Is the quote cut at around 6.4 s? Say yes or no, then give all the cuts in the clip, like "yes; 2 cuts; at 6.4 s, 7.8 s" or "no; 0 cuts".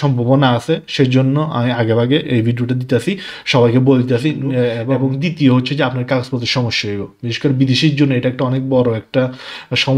no; 1 cut; at 4.9 s